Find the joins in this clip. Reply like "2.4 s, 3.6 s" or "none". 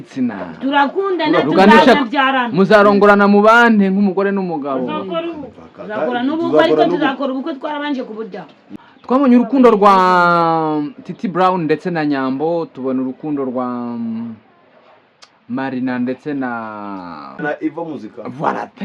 8.7 s, 17.4 s